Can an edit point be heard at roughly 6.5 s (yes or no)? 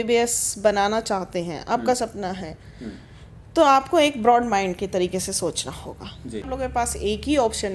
yes